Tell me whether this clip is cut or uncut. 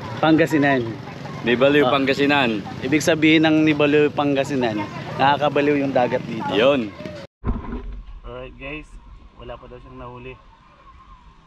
cut